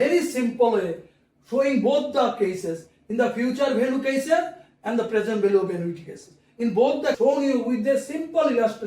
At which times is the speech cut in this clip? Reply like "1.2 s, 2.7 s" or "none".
7.2 s